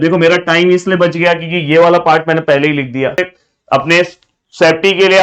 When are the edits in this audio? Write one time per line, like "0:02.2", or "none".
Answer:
0:03.1